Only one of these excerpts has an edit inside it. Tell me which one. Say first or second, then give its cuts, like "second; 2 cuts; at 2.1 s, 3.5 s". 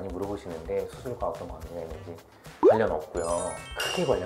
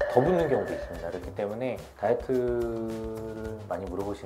second; 1 cut; at 1.9 s